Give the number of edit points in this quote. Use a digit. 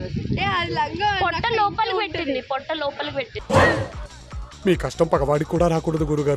1